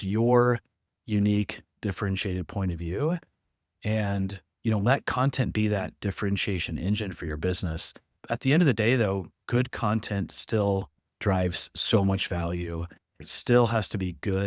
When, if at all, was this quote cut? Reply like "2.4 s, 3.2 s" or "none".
8.1 s, 13.2 s